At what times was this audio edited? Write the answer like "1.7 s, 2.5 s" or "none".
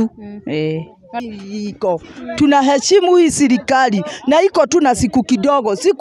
1.2 s